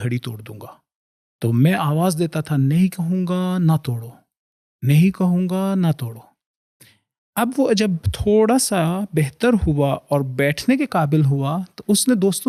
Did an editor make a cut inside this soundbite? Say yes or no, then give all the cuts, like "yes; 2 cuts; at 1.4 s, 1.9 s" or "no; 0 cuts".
no; 0 cuts